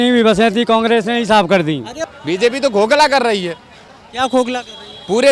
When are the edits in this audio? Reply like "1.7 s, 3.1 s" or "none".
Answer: 2.0 s